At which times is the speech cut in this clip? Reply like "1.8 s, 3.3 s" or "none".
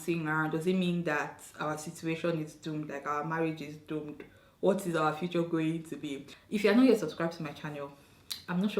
6.3 s